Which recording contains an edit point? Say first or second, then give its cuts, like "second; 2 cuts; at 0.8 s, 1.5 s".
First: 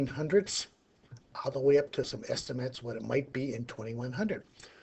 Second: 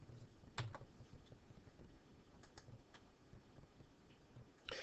first; 1 cut; at 3.2 s